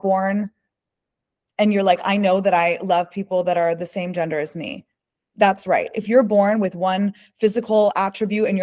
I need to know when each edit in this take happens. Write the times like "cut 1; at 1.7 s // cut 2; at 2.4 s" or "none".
none

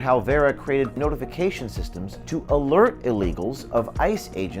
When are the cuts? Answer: cut 1; at 0.9 s

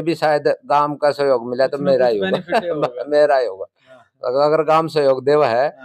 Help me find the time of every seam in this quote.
none

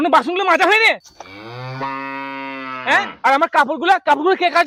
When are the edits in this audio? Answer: none

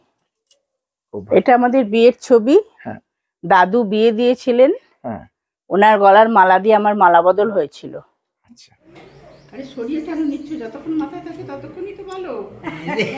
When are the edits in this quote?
cut 1; at 1.2 s // cut 2; at 9.0 s

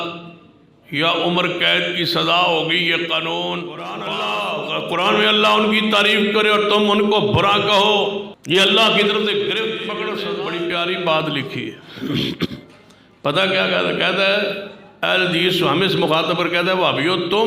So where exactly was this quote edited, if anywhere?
cut 1; at 4.0 s // cut 2; at 8.3 s // cut 3; at 10.1 s

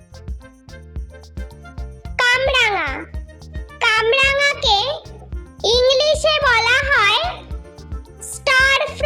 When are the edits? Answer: none

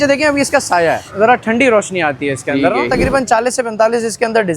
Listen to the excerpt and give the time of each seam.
cut 1; at 1.1 s // cut 2; at 2.9 s

